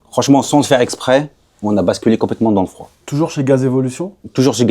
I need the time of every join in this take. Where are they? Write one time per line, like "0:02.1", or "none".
none